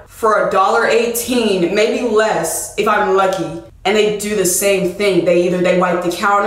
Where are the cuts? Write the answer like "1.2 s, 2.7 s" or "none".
none